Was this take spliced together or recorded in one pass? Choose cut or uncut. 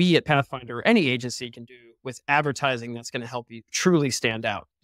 uncut